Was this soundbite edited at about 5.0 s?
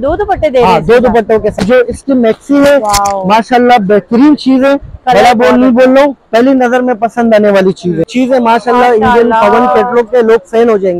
no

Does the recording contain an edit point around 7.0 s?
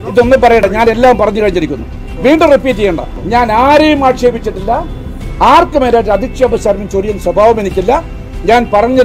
no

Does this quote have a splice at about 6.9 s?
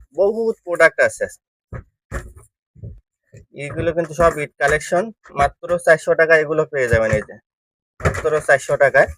no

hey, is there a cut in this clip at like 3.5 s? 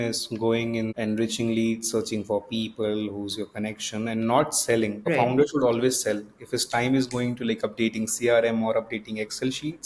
no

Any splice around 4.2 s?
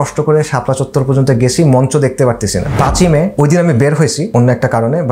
yes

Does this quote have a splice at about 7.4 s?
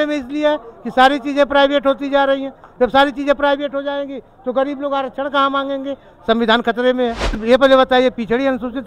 yes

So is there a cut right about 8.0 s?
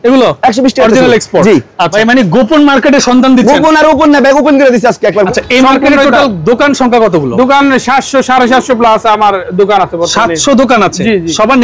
no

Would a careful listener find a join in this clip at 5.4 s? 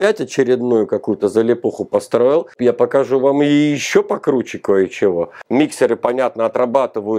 yes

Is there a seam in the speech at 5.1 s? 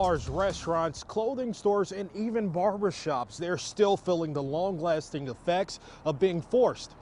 no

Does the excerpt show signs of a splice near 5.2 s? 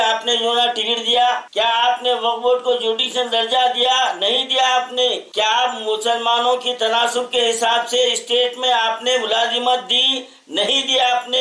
no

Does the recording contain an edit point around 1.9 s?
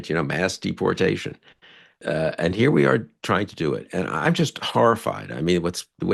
yes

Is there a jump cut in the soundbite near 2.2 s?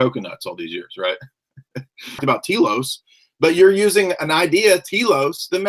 yes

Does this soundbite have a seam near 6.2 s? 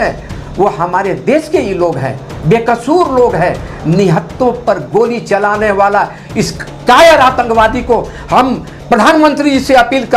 no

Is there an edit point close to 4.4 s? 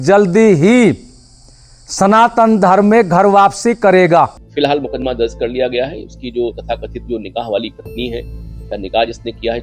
yes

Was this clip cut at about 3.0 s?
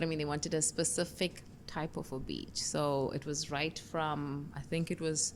no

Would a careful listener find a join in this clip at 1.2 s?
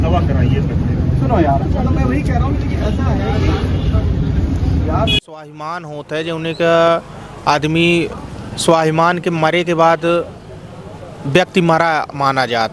no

